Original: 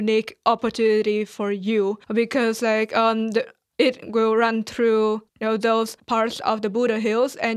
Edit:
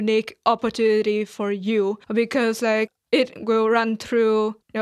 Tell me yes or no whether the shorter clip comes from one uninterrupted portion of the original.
no